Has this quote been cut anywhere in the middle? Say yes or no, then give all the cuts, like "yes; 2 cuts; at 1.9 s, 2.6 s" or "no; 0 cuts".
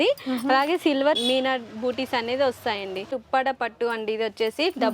yes; 1 cut; at 3.1 s